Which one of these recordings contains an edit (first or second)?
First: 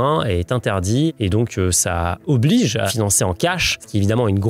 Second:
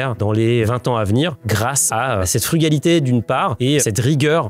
first